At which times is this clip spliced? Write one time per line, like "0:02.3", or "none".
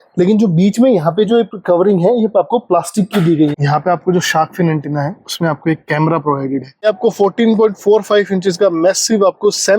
0:03.5
0:06.8

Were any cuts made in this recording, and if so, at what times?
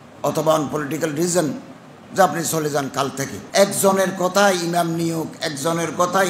0:03.3

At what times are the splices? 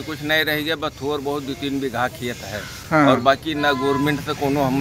none

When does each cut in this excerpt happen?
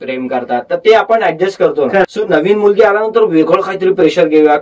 0:02.2

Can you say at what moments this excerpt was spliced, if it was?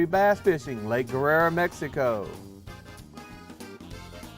0:02.4

